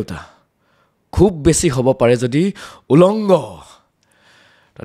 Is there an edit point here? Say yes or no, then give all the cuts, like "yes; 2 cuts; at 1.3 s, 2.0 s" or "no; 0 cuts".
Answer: no; 0 cuts